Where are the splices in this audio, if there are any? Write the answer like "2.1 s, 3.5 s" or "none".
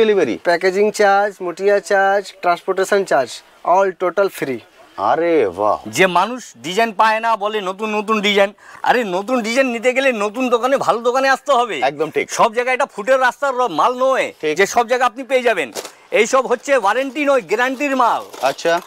5.8 s